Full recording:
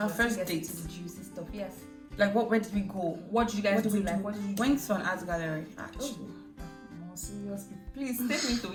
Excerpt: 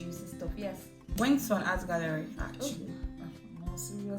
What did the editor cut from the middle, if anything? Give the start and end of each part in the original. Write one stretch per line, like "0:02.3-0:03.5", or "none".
0:02.1-0:04.5

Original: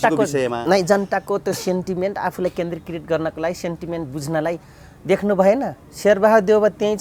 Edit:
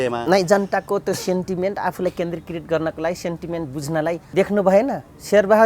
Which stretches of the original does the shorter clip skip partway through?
0:04.6-0:05.0

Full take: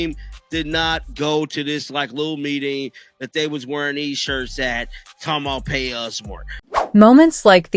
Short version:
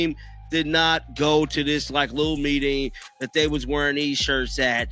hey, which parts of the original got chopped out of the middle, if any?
none

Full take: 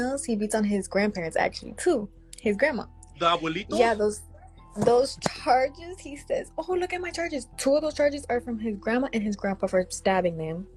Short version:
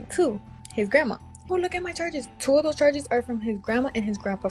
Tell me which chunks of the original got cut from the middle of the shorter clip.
0:03.0-0:06.5

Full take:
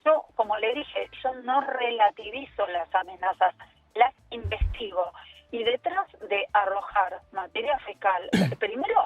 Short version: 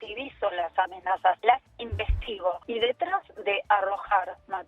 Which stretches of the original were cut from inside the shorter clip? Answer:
0:03.6-0:03.9
0:05.1-0:05.5

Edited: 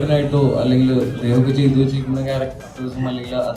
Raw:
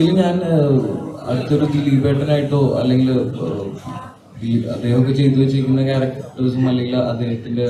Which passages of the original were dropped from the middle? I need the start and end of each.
0:03.3-0:04.8

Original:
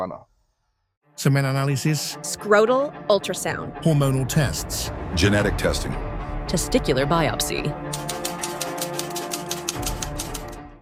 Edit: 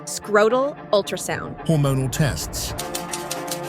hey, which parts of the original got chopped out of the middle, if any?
0:04.9-0:08.1

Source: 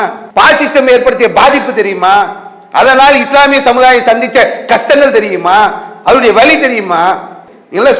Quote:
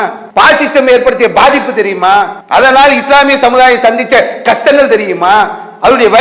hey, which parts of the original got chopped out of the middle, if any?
0:02.4-0:02.6

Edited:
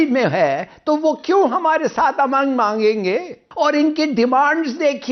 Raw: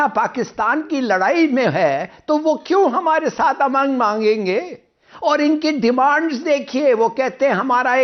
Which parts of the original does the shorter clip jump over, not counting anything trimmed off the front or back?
0:04.8-0:05.0

